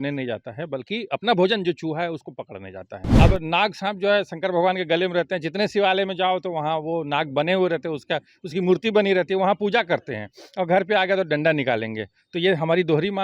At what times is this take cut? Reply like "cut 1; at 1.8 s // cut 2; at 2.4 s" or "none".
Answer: cut 1; at 3.0 s